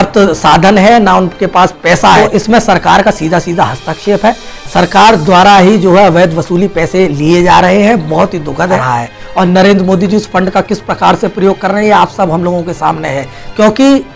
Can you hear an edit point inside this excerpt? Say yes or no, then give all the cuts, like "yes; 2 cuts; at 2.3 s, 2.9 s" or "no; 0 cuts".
yes; 2 cuts; at 2.2 s, 8.8 s